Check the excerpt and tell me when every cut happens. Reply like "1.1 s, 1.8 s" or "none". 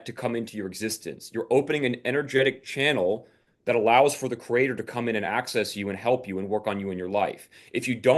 none

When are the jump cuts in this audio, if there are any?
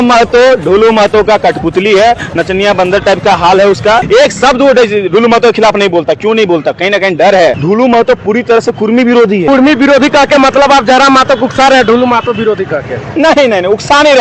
4.0 s, 7.6 s, 9.5 s

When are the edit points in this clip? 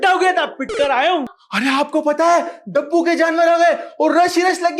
1.3 s

